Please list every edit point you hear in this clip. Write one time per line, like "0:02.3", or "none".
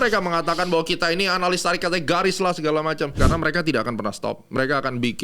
0:03.1